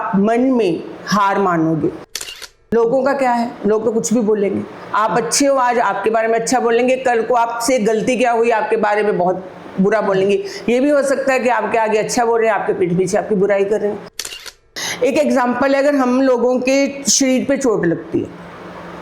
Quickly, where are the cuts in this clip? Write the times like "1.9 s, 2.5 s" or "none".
2.1 s, 14.5 s